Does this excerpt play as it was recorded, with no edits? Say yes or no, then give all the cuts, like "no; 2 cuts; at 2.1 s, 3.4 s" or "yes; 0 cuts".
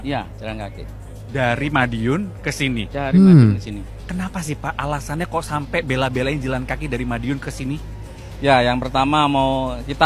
yes; 0 cuts